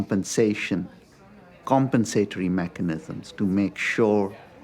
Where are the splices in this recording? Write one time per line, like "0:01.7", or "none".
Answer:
none